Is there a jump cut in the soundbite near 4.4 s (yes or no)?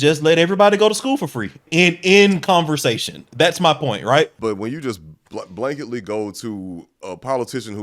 yes